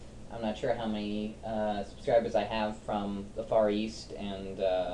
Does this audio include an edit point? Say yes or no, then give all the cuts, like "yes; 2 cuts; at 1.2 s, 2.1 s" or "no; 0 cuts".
yes; 1 cut; at 1.2 s